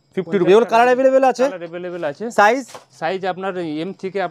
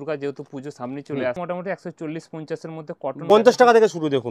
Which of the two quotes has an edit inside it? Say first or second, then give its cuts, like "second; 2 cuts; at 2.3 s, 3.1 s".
second; 2 cuts; at 1.4 s, 3.2 s